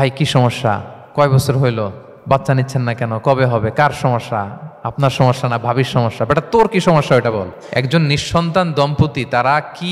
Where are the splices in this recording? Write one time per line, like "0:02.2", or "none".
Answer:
0:01.0
0:02.1
0:07.6